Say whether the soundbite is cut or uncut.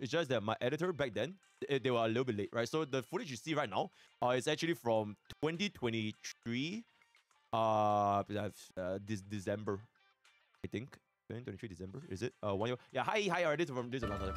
uncut